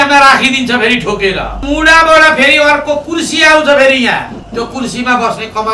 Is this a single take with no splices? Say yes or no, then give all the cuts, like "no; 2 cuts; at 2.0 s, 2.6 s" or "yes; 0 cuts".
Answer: no; 2 cuts; at 1.6 s, 4.4 s